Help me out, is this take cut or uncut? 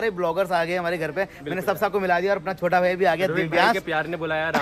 uncut